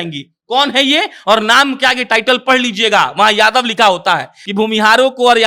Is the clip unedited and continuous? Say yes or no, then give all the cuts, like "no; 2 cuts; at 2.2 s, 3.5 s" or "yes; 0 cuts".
no; 1 cut; at 4.4 s